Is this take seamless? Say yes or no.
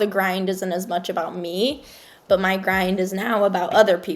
yes